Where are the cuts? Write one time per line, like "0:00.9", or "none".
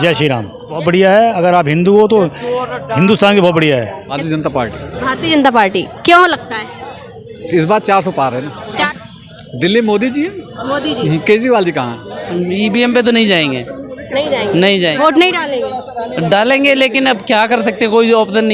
0:00.8
0:04.2
0:08.9
0:12.2